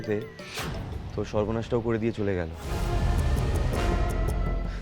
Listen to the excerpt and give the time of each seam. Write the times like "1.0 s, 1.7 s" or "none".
none

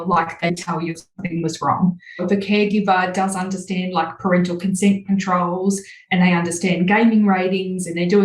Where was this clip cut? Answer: none

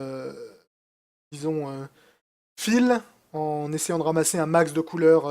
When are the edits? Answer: 3.7 s

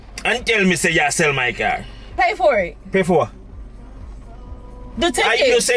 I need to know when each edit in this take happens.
2.2 s, 4.5 s

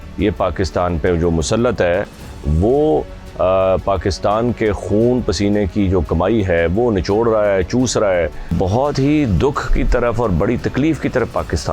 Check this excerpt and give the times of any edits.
8.5 s

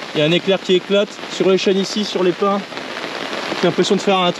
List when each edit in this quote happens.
none

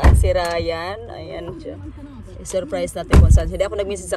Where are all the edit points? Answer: none

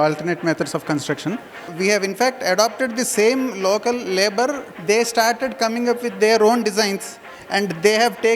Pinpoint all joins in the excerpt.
1.6 s, 4.7 s

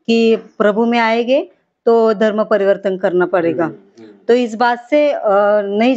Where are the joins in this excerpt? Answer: none

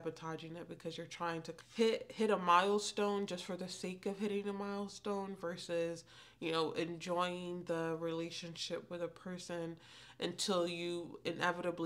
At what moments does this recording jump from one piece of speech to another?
1.5 s

